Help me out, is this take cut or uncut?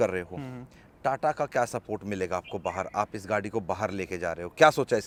uncut